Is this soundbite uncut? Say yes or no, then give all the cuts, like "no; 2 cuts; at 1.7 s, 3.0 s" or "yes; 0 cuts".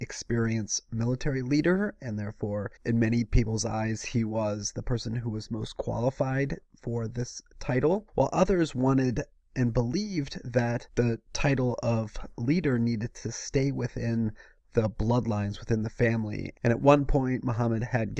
no; 1 cut; at 15.8 s